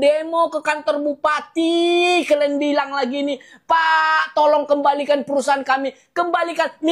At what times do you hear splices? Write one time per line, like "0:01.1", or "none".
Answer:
none